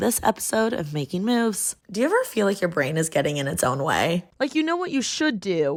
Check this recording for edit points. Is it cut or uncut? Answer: uncut